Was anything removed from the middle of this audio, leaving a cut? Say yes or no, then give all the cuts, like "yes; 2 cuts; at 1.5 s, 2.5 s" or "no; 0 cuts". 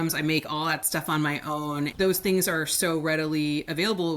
yes; 1 cut; at 1.9 s